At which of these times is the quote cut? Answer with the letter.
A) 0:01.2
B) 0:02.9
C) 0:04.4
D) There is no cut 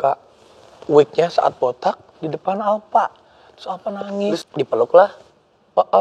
C